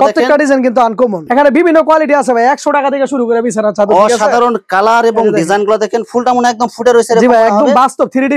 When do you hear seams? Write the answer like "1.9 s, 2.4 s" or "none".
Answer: 1.2 s